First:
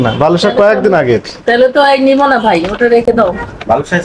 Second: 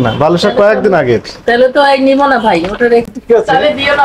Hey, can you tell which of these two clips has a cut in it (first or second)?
second